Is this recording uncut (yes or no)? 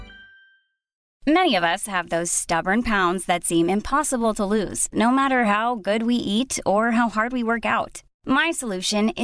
no